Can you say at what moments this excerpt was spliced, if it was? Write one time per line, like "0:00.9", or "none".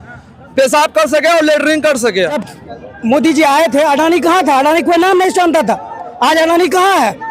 0:02.5